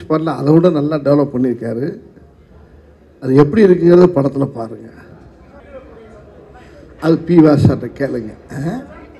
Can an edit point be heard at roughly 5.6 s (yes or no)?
yes